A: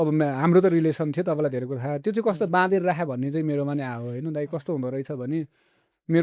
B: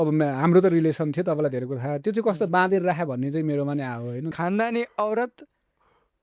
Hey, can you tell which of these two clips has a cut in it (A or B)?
B